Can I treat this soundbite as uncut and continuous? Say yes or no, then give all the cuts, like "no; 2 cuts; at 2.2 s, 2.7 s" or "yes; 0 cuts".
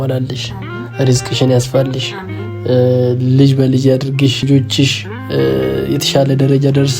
no; 1 cut; at 4.4 s